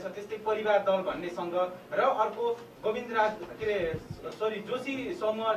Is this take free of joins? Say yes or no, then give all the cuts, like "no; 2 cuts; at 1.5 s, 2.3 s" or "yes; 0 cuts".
yes; 0 cuts